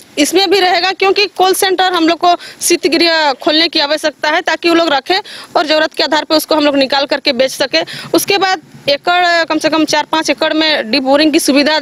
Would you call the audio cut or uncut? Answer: uncut